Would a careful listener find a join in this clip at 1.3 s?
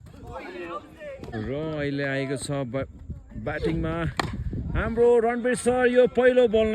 yes; 1 cut; at 1.3 s

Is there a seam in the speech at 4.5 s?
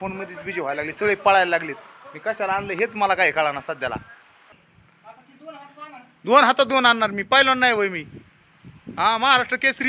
yes; 1 cut; at 4.5 s

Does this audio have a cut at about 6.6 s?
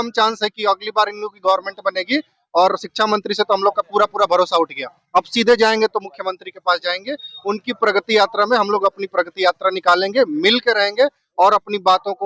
no; 0 cuts

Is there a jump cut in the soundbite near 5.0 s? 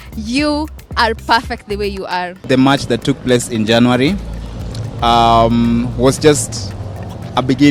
no; 1 cut; at 2.4 s

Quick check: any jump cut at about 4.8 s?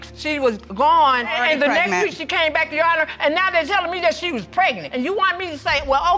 yes; 2 cuts; at 1.3 s, 4.8 s

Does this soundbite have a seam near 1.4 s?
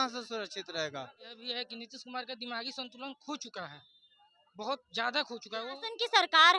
yes; 2 cuts; at 1.4 s, 5.7 s

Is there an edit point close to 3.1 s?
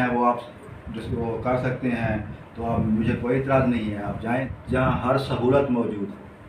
no; 1 cut; at 4.5 s

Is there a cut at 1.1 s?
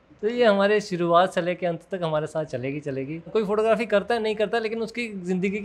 no; 1 cut; at 3.3 s

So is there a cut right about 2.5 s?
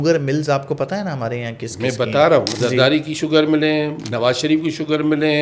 yes; 1 cut; at 2.5 s

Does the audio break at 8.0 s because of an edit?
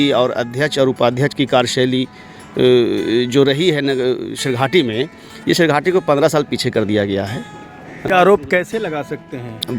yes; 1 cut; at 8.0 s

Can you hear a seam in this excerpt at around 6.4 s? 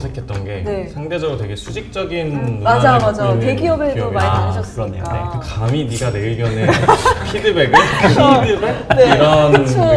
no; 0 cuts

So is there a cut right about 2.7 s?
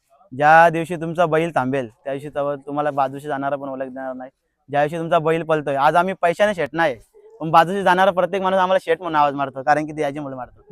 no; 0 cuts

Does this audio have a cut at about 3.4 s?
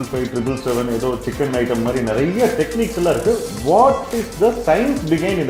no; 0 cuts

